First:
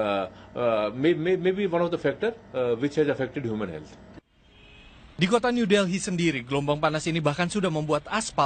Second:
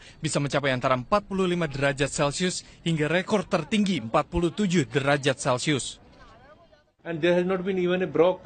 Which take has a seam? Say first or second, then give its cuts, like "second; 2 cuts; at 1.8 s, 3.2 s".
second; 1 cut; at 3.9 s